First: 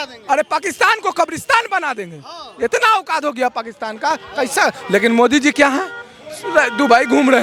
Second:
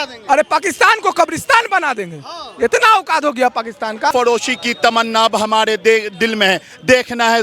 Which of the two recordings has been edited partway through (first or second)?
second